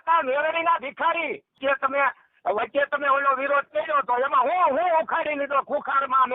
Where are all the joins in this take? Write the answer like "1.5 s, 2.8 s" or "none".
1.6 s